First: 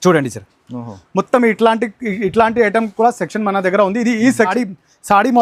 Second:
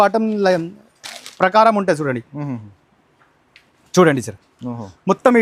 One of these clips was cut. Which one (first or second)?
first